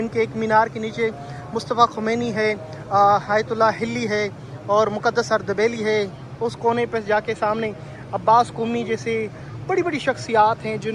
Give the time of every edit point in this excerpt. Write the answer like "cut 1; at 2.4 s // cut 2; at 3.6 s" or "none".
none

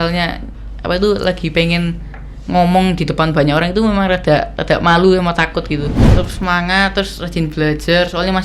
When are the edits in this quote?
cut 1; at 6.0 s

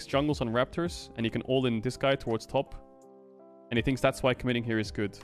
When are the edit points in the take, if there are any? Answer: none

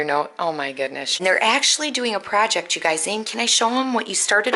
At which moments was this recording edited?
cut 1; at 1.1 s

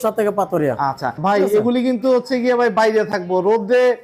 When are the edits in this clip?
cut 1; at 1.2 s

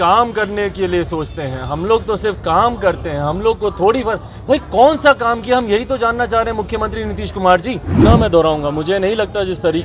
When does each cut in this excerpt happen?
cut 1; at 8.0 s

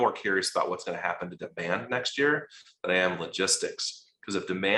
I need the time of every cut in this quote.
none

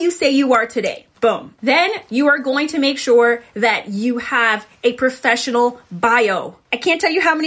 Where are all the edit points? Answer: cut 1; at 1.5 s

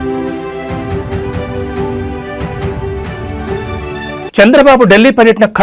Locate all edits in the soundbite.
none

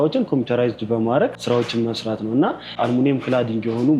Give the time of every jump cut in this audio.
cut 1; at 1.4 s // cut 2; at 2.7 s

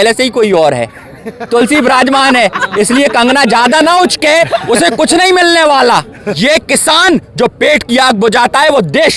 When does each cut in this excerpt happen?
cut 1; at 6.2 s

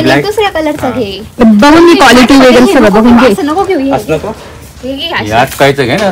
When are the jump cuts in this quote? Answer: none

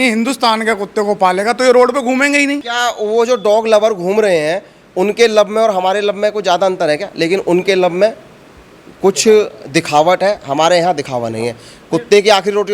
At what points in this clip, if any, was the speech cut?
cut 1; at 2.7 s

